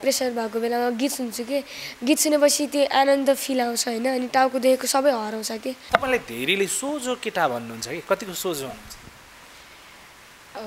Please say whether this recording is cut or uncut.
cut